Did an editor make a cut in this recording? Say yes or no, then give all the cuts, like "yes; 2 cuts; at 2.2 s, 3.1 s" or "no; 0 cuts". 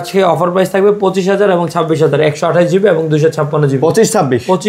no; 0 cuts